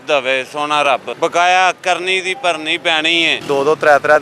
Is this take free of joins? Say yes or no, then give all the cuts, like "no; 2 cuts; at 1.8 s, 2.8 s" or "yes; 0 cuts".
no; 2 cuts; at 1.1 s, 3.3 s